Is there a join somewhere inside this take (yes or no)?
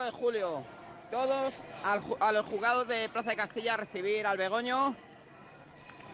no